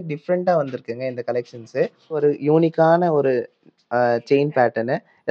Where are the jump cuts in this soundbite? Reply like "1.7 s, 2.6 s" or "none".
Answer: 2.2 s